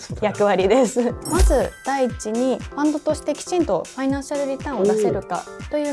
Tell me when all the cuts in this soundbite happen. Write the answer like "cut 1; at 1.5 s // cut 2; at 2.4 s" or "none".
cut 1; at 1.2 s